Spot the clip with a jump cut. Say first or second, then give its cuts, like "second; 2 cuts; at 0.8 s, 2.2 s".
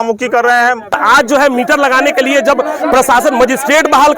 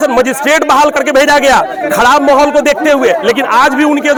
first; 1 cut; at 1.0 s